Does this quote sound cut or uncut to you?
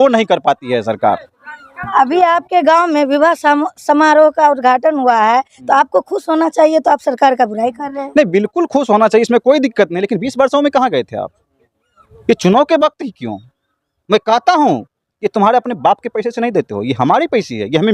uncut